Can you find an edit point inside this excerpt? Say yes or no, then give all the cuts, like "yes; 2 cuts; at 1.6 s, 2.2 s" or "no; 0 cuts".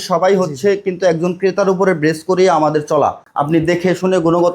yes; 1 cut; at 3.2 s